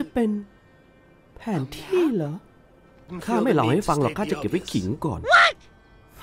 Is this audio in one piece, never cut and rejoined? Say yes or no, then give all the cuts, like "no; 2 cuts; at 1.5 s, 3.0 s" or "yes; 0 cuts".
no; 1 cut; at 3.2 s